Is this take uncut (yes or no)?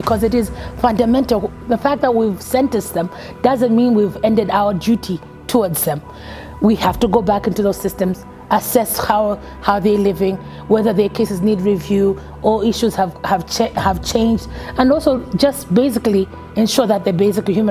yes